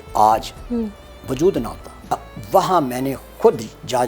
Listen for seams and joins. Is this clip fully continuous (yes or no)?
no